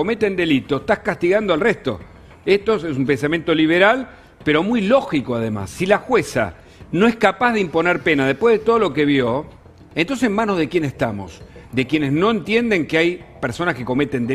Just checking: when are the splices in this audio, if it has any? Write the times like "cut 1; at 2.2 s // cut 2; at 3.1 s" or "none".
cut 1; at 9.8 s